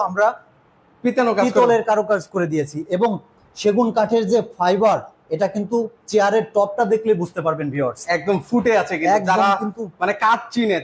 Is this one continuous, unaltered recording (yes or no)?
yes